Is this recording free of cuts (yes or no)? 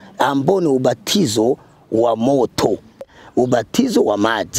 no